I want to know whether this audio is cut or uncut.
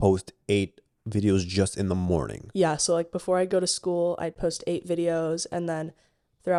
uncut